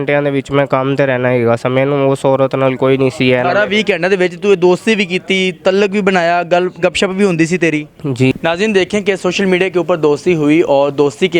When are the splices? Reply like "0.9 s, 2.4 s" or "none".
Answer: 8.3 s